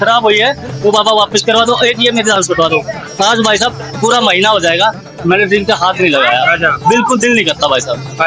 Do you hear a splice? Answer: no; 0 cuts

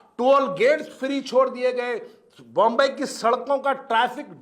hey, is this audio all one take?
yes; 0 cuts

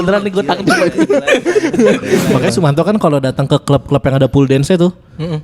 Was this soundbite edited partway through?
yes; 1 cut; at 2.3 s

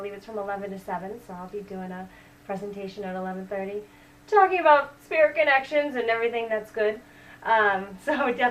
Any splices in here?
yes; 1 cut; at 3.0 s

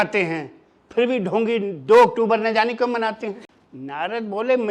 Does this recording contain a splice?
yes; 1 cut; at 3.4 s

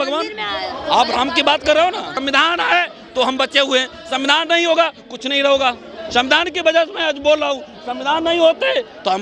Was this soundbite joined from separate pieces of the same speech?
yes; 1 cut; at 2.1 s

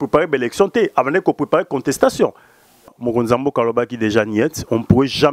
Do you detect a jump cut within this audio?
yes; 1 cut; at 3.0 s

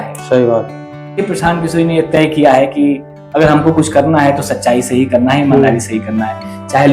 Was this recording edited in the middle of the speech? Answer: yes; 1 cut; at 1.2 s

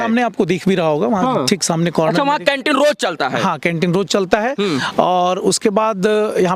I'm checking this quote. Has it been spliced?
no; 0 cuts

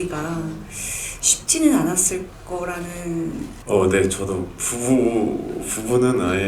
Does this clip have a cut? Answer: yes; 1 cut; at 3.6 s

